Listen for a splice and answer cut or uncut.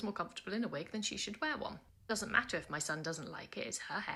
uncut